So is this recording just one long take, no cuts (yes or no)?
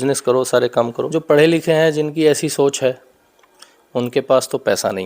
no